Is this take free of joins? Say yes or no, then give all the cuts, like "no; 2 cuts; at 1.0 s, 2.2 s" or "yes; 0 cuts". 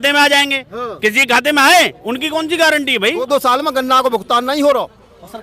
no; 1 cut; at 3.2 s